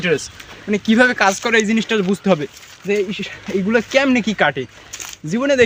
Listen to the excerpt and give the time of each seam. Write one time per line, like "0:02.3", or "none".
none